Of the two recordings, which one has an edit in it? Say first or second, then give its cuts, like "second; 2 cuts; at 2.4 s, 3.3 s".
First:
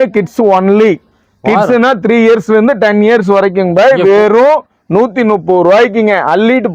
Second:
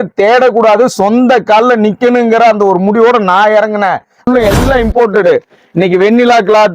second; 1 cut; at 4.3 s